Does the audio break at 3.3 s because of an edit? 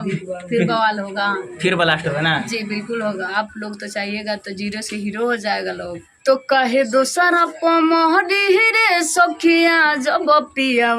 yes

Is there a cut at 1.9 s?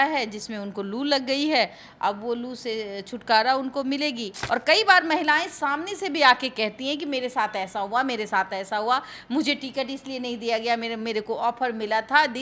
no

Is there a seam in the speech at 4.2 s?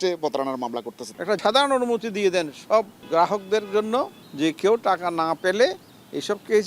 yes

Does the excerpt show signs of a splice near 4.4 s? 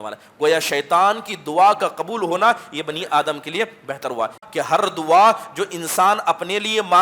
yes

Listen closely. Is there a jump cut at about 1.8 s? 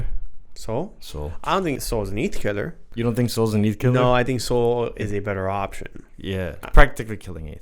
yes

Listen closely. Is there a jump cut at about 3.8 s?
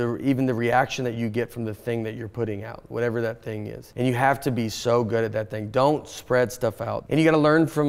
yes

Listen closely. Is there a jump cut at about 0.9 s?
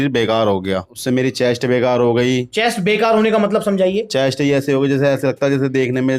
yes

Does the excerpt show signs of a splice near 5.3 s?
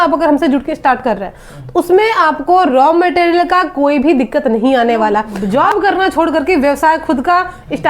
yes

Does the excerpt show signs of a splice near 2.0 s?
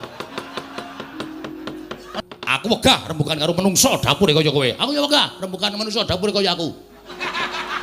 yes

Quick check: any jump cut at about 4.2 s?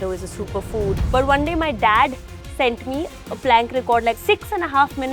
yes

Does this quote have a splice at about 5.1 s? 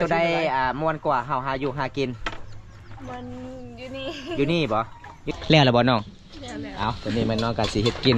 yes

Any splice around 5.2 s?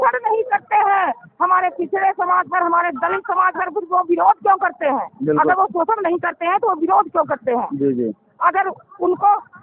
no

